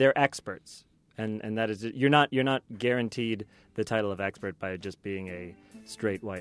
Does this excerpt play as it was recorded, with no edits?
yes; 0 cuts

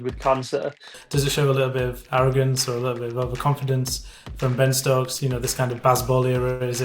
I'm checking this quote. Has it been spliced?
yes; 1 cut; at 1.0 s

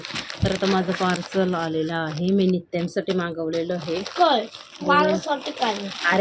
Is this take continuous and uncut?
yes; 0 cuts

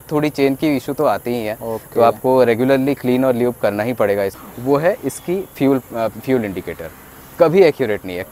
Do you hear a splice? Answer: yes; 1 cut; at 4.4 s

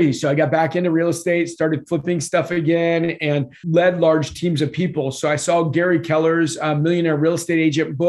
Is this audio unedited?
no; 1 cut; at 3.6 s

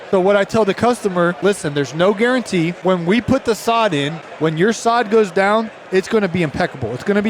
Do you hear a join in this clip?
yes; 3 cuts; at 1.4 s, 2.8 s, 4.2 s

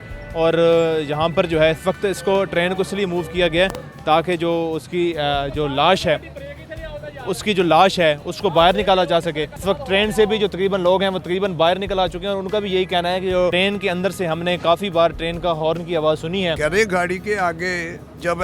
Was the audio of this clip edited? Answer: no; 0 cuts

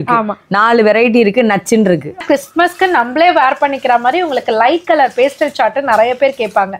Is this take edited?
yes; 1 cut; at 2.2 s

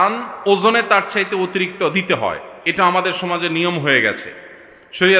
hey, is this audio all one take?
yes; 0 cuts

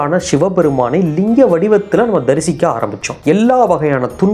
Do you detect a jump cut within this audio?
yes; 1 cut; at 3.1 s

